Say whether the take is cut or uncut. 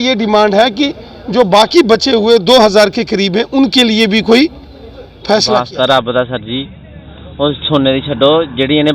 cut